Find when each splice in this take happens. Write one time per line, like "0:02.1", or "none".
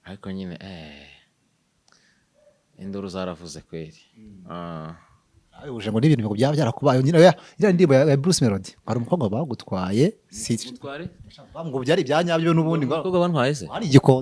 none